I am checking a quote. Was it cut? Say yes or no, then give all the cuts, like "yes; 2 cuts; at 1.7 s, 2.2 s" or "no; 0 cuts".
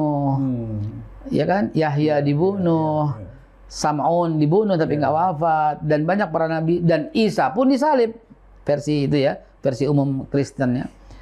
no; 0 cuts